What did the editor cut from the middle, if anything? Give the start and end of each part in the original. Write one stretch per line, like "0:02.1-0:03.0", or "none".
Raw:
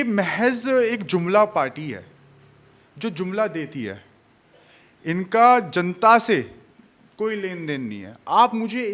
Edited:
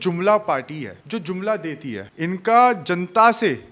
0:02.0-0:02.9
0:04.0-0:04.9